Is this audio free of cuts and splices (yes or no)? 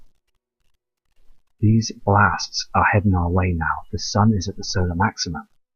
no